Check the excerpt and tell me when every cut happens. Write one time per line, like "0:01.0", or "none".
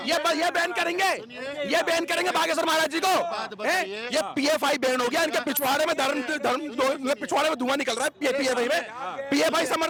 none